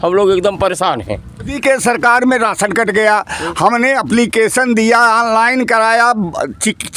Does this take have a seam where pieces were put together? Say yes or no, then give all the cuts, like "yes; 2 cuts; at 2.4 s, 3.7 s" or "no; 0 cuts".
yes; 1 cut; at 1.6 s